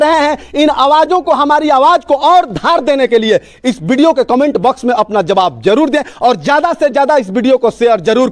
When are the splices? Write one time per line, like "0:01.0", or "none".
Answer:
none